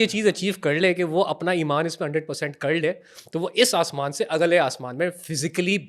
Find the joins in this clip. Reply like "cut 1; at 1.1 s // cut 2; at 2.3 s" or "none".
none